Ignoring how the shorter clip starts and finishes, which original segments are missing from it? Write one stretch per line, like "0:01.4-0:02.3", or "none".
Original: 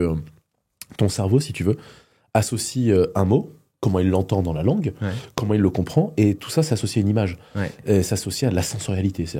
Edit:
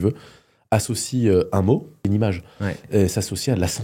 0:03.6-0:07.0